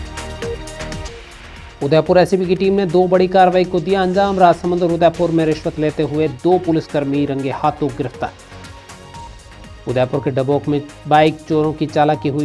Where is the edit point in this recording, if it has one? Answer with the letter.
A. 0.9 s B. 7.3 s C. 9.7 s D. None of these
A